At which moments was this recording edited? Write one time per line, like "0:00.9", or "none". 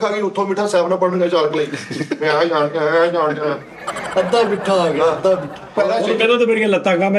none